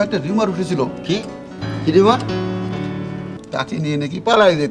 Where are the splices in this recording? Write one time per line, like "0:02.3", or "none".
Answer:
0:03.4